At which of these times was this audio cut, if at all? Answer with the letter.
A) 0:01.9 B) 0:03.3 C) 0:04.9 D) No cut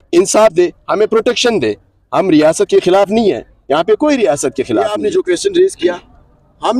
C